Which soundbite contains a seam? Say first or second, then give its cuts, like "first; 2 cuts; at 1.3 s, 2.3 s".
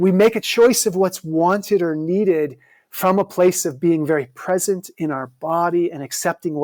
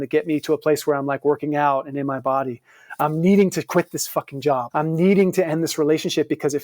second; 1 cut; at 4.7 s